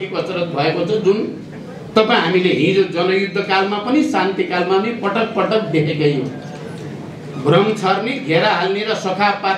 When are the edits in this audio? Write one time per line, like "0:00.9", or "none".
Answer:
none